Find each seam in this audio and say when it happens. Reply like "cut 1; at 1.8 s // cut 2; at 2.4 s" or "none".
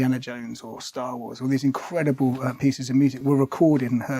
cut 1; at 3.2 s

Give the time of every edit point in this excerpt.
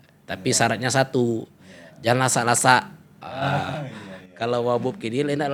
none

